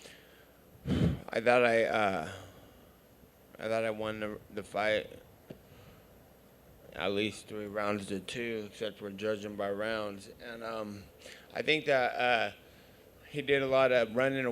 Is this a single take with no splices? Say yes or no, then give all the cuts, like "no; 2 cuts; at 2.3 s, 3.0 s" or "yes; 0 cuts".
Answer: no; 1 cut; at 8.3 s